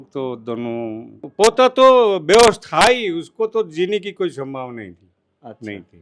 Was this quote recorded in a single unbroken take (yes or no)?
no